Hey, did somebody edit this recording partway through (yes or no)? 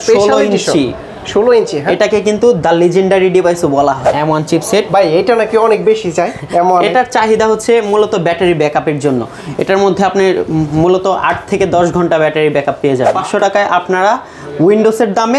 yes